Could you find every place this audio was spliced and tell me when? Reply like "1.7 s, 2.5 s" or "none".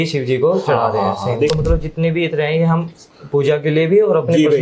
1.5 s

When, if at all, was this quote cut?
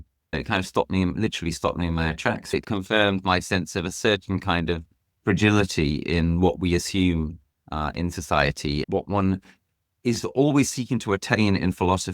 2.6 s, 8.9 s

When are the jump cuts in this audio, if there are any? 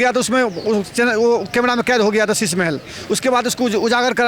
none

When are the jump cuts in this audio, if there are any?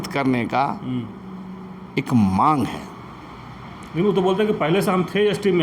none

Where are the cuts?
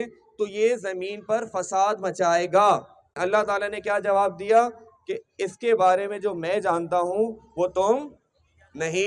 3.2 s

